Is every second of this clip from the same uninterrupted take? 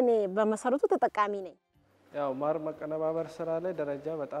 no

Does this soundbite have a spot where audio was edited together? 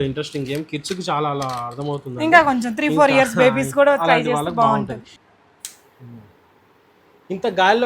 yes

